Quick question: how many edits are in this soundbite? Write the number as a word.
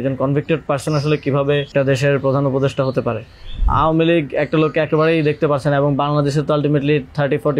two